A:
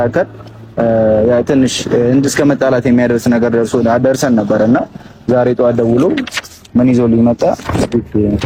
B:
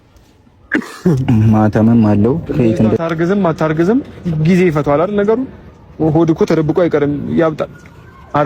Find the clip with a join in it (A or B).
B